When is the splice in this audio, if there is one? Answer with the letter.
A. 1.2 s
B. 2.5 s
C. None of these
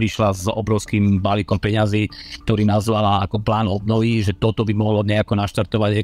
C